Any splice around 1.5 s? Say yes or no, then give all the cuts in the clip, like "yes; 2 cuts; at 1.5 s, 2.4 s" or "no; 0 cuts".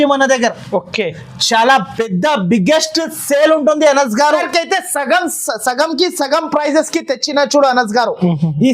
no; 1 cut; at 4.4 s